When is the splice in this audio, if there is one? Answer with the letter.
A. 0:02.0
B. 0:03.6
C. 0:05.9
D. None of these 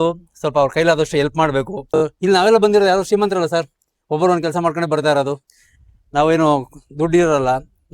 A